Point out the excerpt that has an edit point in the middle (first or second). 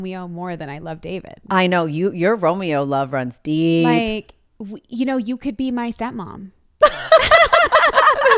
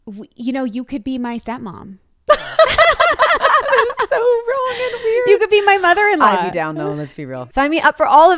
second